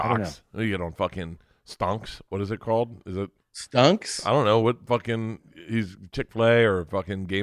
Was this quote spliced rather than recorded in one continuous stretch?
no; 0 cuts

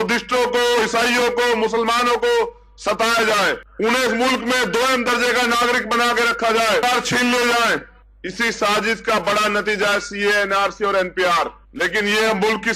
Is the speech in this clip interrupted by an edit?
yes; 1 cut; at 6.8 s

